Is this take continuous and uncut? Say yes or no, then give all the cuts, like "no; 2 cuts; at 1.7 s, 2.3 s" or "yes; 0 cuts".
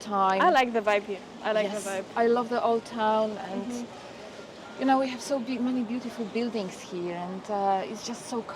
yes; 0 cuts